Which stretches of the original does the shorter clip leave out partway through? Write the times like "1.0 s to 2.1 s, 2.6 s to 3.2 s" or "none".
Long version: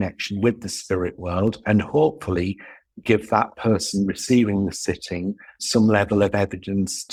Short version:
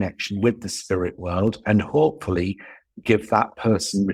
none